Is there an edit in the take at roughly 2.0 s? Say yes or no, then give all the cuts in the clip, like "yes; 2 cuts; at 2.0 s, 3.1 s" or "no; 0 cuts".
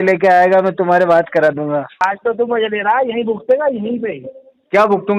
yes; 1 cut; at 2.0 s